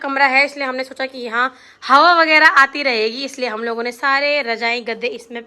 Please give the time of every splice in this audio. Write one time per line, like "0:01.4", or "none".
none